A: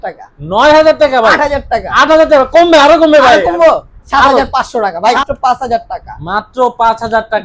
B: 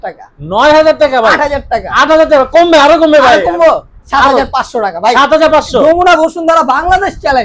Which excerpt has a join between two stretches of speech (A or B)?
A